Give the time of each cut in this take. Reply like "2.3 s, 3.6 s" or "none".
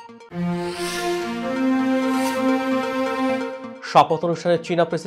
none

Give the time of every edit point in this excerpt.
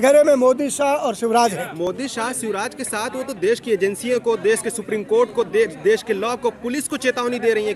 none

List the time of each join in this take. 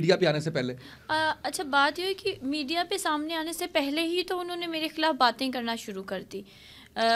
none

